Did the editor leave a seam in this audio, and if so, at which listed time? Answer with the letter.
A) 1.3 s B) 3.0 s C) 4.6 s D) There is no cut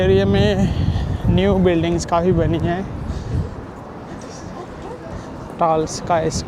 D